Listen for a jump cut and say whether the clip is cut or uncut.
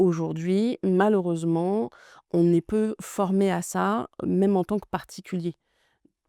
uncut